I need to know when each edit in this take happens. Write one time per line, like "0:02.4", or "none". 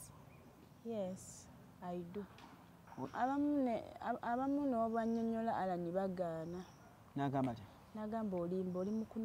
0:03.1